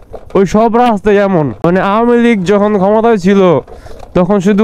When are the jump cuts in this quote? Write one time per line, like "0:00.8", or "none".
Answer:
0:01.6